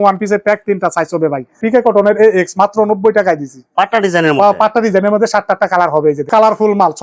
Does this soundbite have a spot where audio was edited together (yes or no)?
yes